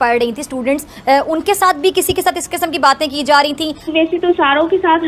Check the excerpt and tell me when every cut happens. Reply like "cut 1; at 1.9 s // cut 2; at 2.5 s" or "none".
none